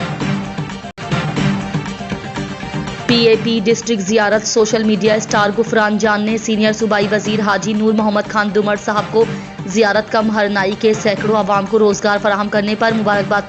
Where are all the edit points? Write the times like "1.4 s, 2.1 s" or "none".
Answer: 0.9 s, 2.9 s